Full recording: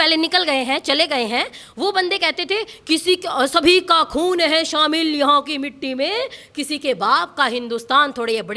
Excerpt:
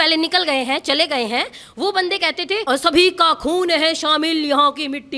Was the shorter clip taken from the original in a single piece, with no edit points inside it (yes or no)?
no